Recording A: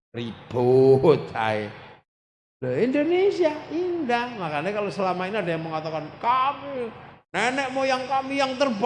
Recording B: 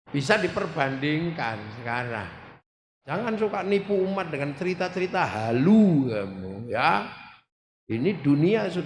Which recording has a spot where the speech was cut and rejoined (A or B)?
B